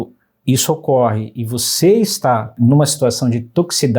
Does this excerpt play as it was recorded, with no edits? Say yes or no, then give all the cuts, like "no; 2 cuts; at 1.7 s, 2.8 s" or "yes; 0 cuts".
no; 1 cut; at 2.5 s